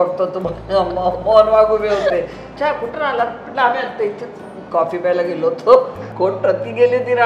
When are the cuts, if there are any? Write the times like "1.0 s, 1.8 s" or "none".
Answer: 2.4 s, 6.0 s